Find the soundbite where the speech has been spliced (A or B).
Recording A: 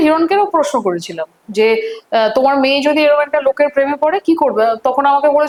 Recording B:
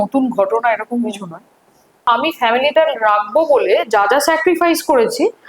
B